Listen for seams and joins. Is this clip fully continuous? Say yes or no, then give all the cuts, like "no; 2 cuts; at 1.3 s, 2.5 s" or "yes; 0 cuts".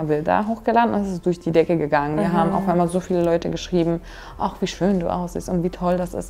yes; 0 cuts